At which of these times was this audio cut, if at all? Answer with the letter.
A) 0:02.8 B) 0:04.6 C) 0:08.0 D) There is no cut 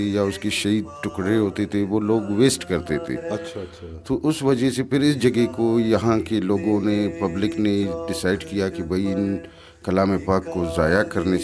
D